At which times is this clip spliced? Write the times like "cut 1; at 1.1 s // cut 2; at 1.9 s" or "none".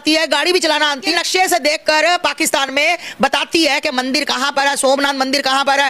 cut 1; at 1.2 s